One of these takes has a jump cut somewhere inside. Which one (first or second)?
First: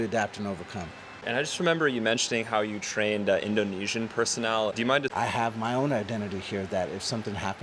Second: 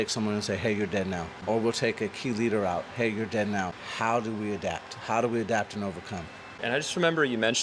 first